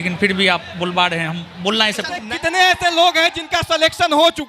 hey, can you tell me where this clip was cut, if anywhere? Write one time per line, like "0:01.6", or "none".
0:02.2